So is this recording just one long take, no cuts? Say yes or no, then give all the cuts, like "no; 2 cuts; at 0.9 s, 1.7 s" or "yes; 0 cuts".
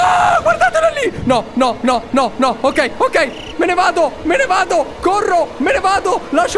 yes; 0 cuts